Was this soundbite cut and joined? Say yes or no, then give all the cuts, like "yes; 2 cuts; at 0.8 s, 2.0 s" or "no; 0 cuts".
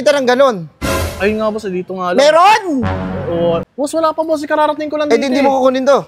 yes; 1 cut; at 3.6 s